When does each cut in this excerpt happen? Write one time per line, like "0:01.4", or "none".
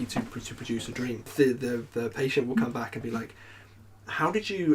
0:01.3